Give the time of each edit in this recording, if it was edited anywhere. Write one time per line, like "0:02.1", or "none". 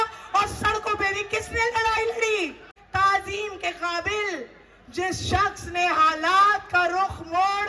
0:02.7

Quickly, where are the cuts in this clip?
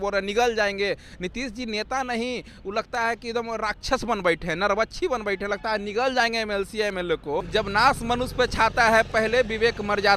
0:07.4

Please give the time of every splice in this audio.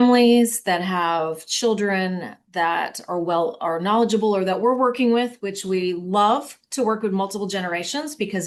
none

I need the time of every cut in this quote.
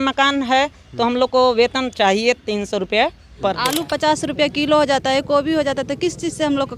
0:03.6

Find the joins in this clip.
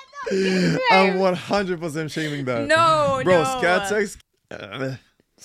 0:04.2

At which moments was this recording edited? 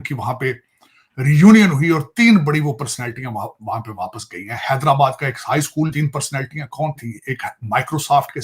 0:05.9

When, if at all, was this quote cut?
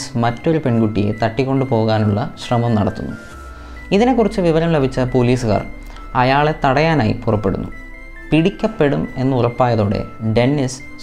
none

